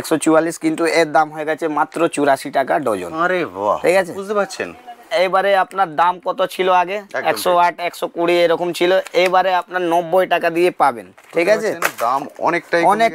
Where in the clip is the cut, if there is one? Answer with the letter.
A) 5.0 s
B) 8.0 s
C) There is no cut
A